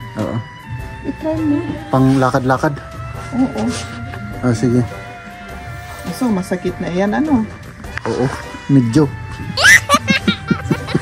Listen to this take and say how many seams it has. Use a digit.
0